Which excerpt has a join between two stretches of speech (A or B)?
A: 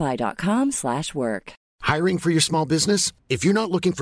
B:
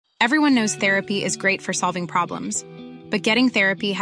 A